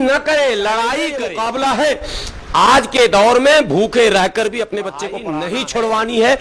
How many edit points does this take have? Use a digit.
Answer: 2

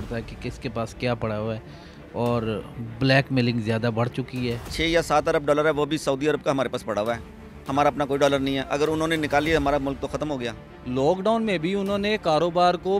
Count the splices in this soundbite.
2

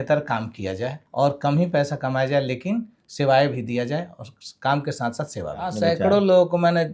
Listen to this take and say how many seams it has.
2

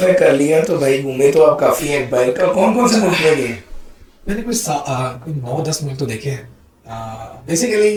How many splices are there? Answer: 0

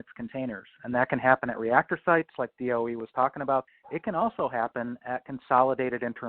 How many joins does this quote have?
1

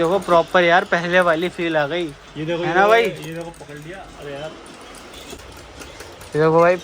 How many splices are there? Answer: 1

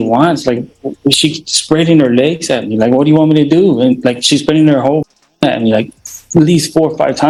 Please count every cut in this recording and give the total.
0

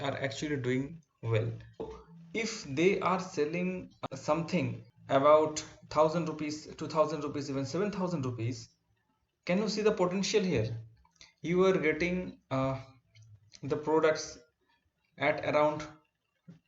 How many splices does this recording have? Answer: 3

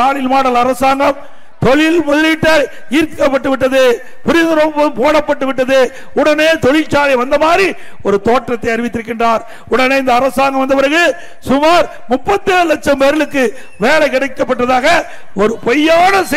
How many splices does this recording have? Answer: 0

